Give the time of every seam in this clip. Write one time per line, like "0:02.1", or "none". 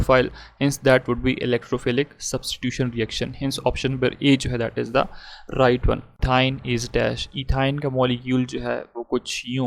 0:06.1